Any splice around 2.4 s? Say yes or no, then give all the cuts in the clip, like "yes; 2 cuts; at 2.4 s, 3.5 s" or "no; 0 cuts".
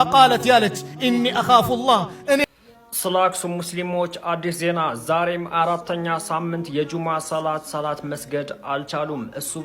yes; 1 cut; at 2.4 s